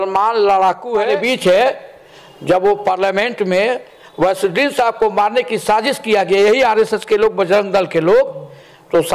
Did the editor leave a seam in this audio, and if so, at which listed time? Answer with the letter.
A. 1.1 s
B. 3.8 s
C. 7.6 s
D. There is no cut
A